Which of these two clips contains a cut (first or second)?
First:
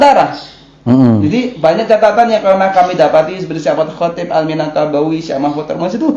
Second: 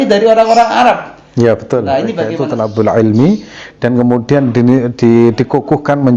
second